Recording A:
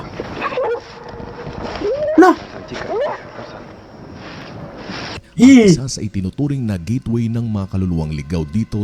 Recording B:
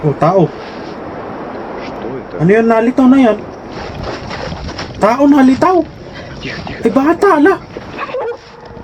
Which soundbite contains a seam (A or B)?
A